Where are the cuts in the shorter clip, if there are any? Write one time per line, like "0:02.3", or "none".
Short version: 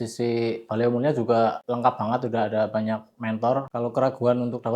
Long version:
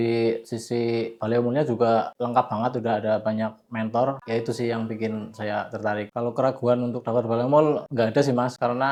0:03.7

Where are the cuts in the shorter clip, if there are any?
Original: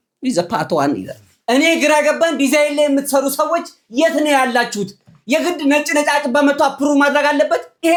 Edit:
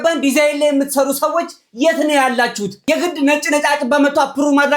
0:02.7

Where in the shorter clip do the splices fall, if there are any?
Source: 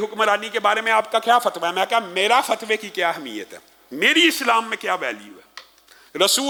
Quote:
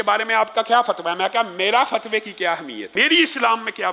0:02.8

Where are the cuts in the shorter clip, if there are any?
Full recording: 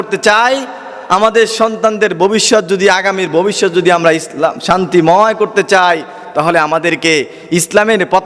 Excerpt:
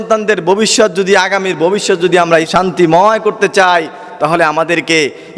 0:02.5

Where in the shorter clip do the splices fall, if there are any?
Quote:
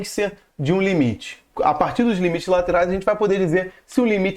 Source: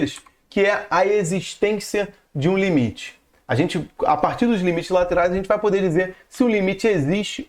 0:01.4

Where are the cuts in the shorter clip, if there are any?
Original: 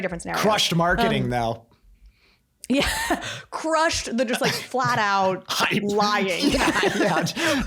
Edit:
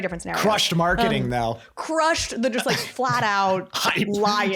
0:01.7

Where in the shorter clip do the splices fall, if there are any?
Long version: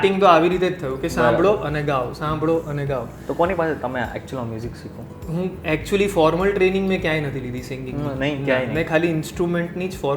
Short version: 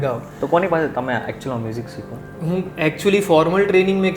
none

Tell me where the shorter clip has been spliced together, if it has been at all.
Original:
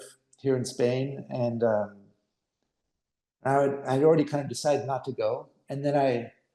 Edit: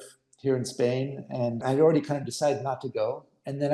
0:01.6

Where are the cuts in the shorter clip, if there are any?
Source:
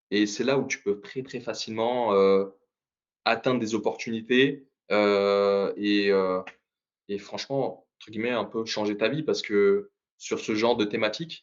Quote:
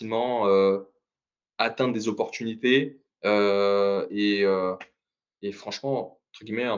none

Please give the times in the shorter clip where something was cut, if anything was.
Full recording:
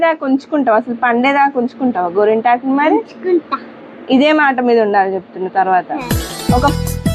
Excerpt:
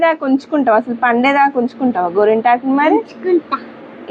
none

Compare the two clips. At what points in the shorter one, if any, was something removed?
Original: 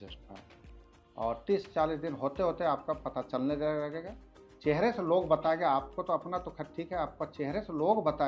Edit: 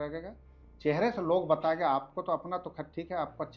none

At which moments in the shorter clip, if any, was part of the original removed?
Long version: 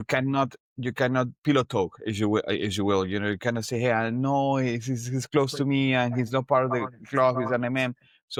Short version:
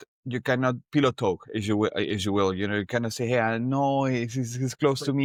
none

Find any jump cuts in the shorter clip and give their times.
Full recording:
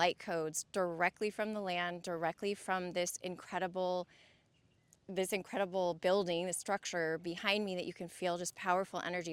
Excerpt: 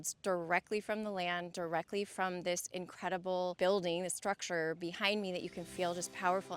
0:03.6

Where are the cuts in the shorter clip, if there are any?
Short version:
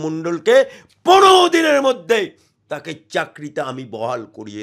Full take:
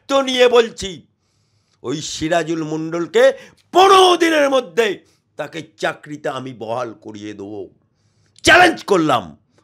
none

